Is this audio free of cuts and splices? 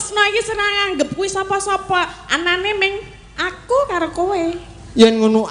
yes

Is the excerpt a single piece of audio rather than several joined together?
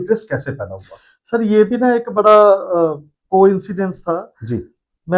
yes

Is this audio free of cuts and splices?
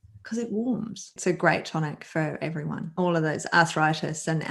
no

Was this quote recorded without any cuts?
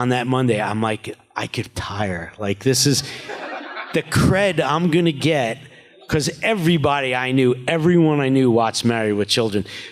no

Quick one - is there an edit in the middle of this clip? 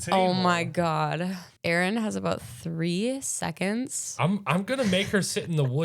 yes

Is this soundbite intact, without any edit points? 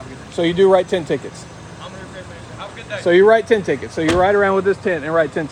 yes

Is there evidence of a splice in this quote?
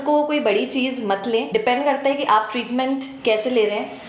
yes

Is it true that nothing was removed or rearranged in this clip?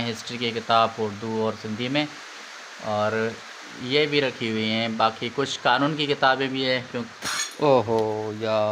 no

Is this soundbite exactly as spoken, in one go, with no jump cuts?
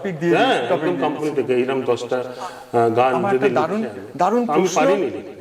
yes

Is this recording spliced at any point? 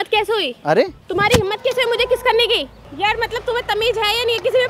yes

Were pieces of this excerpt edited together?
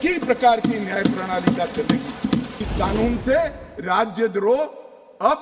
yes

